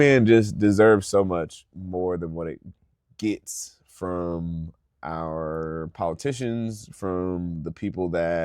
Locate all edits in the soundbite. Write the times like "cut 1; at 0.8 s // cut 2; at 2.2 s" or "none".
none